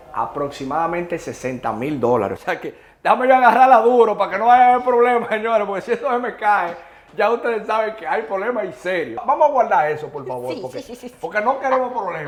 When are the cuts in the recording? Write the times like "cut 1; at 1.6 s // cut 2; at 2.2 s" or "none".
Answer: none